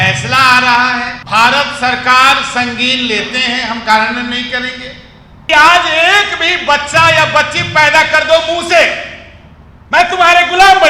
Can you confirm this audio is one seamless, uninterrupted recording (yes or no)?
no